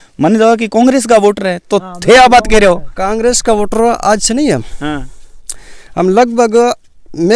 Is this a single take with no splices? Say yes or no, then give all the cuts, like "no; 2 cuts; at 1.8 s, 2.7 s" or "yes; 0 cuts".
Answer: yes; 0 cuts